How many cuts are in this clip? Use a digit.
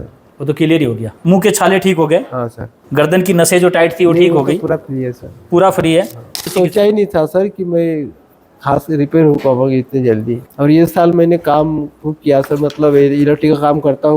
4